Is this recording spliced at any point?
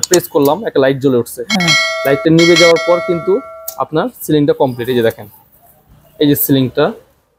no; 0 cuts

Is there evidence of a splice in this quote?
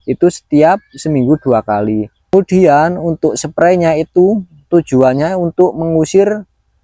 yes; 1 cut; at 2.3 s

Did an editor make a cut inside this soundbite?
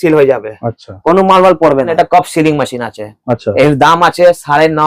yes; 1 cut; at 1.9 s

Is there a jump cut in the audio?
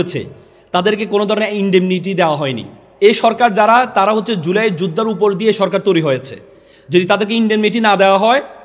yes; 1 cut; at 2.8 s

